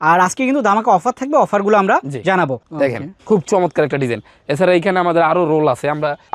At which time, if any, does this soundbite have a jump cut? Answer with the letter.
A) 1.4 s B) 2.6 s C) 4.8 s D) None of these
B